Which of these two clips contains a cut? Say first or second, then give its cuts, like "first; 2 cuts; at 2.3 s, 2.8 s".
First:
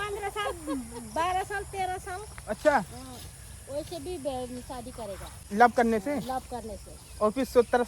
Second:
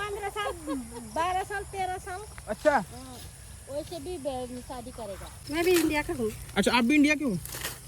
second; 1 cut; at 5.4 s